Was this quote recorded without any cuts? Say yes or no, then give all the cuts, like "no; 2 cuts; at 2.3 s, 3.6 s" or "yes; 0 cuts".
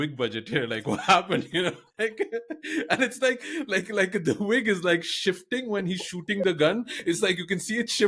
yes; 0 cuts